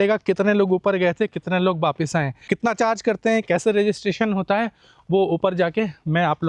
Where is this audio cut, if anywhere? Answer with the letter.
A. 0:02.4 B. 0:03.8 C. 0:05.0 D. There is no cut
A